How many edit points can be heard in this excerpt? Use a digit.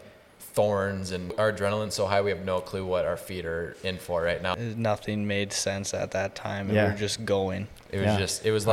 2